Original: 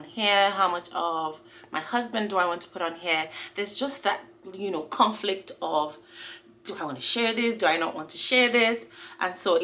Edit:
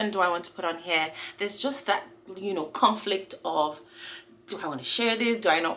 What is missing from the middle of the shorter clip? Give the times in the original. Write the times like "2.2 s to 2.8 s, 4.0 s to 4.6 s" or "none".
none